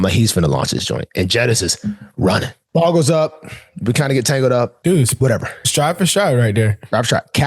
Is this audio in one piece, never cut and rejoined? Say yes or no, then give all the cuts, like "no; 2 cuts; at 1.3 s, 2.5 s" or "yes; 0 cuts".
no; 2 cuts; at 2.6 s, 4.8 s